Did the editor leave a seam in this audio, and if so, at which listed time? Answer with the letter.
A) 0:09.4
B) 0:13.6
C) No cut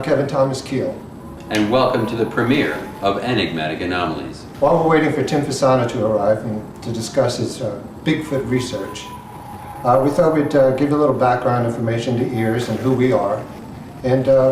A